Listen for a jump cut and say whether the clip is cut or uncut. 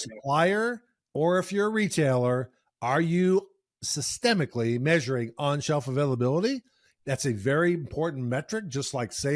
cut